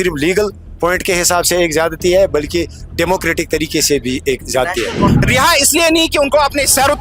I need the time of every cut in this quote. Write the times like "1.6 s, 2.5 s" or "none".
5.2 s